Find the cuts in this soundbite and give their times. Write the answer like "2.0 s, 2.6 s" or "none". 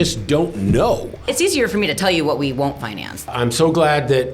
1.2 s, 3.3 s